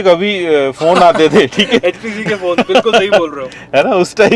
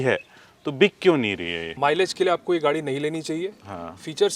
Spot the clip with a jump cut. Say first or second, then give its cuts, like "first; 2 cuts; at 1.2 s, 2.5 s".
second; 1 cut; at 1.6 s